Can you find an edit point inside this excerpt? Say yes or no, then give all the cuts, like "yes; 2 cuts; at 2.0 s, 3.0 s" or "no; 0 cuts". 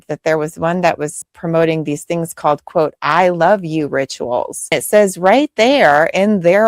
yes; 2 cuts; at 1.3 s, 4.7 s